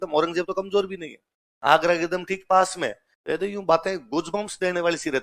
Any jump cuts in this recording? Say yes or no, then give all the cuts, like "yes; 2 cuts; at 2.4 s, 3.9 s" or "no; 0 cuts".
no; 0 cuts